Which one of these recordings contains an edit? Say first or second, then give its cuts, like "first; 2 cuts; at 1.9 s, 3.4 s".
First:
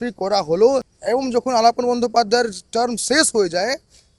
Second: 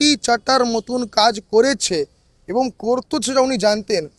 first; 1 cut; at 0.9 s